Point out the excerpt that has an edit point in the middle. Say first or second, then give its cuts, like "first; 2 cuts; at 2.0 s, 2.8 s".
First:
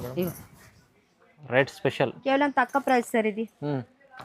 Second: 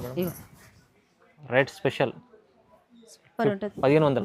first; 1 cut; at 2.2 s